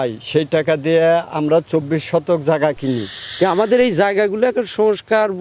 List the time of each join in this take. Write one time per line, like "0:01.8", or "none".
0:03.3